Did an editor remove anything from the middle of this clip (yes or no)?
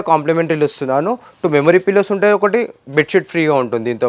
no